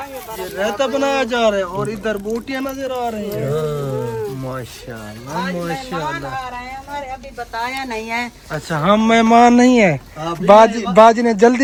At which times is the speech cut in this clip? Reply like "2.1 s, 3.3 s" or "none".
none

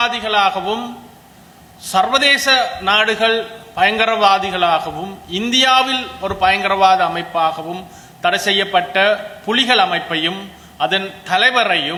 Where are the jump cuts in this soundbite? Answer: none

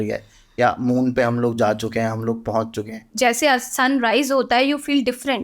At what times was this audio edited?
3.0 s

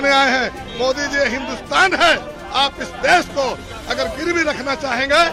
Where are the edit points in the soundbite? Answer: none

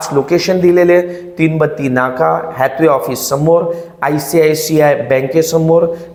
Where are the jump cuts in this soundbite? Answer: none

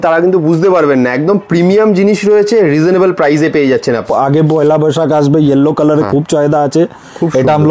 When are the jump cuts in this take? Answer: 4.0 s

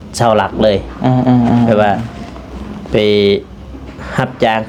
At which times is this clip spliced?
none

